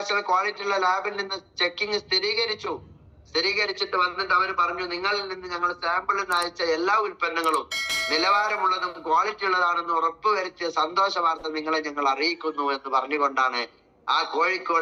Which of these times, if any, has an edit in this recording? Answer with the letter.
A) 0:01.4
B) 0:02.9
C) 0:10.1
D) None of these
D